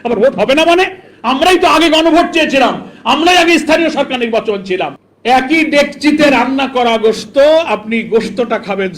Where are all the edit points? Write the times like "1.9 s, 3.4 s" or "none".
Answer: 5.0 s